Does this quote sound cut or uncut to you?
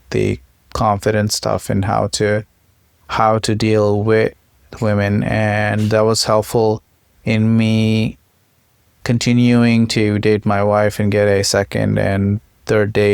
uncut